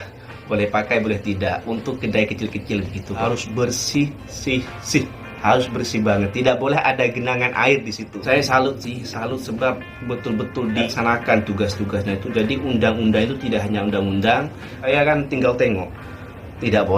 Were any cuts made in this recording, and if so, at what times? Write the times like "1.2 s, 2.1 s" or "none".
3.2 s, 8.2 s, 10.8 s, 14.7 s

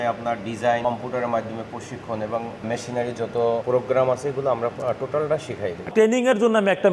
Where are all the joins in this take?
0.8 s, 2.6 s, 3.6 s, 5.9 s

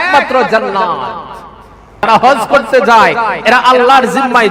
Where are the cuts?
1.4 s

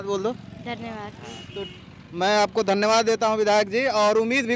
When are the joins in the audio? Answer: none

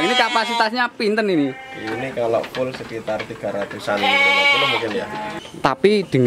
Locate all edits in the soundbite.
5.3 s

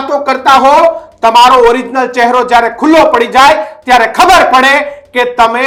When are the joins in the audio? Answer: none

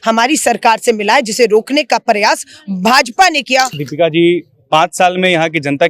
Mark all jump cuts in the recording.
3.8 s

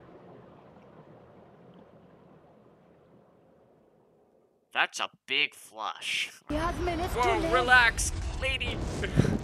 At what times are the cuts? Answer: 6.5 s

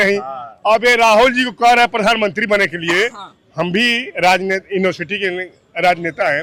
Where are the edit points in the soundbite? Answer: none

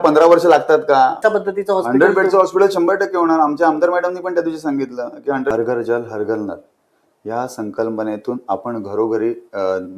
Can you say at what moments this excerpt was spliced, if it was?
1.2 s, 5.5 s

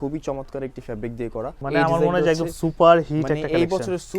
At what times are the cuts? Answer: 1.5 s

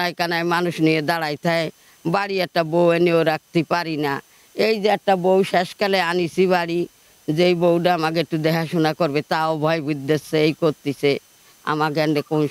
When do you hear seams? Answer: none

